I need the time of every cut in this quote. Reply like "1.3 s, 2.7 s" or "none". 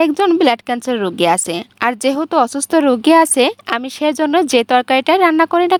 none